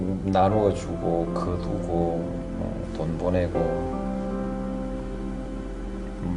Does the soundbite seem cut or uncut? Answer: cut